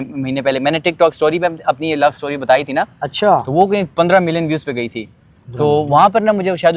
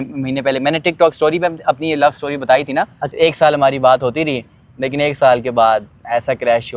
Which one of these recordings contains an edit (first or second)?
second